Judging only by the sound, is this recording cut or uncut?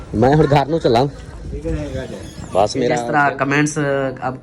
cut